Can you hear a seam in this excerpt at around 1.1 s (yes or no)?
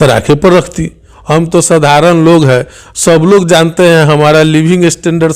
yes